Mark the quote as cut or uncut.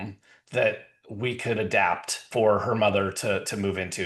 cut